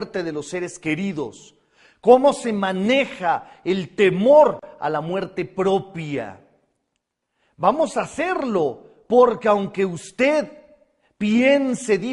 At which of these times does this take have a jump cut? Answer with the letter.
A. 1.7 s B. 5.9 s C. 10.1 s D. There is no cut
B